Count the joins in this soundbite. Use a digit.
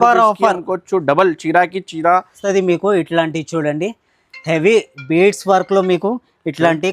1